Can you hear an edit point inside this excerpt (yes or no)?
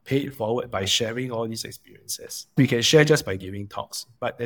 yes